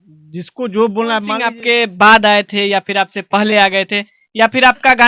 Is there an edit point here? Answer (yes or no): yes